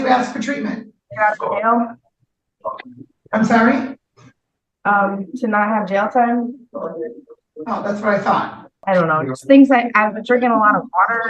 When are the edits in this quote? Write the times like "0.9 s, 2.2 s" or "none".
1.0 s, 8.7 s